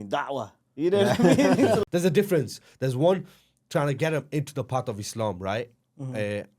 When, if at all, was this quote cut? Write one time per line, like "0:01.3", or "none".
0:01.8